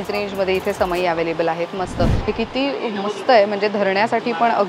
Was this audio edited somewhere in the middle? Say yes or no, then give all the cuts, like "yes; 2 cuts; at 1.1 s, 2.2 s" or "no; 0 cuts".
yes; 1 cut; at 2.3 s